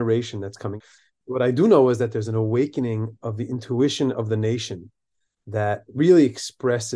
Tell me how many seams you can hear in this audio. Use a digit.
1